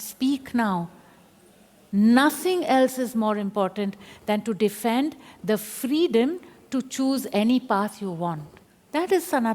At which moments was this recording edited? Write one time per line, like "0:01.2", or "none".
none